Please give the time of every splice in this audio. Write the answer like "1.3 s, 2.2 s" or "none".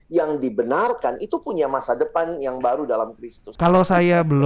3.5 s